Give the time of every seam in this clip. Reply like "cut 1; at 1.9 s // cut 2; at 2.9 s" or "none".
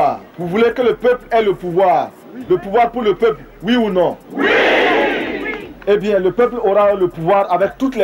none